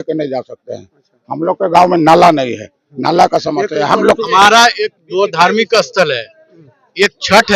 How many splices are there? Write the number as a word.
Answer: one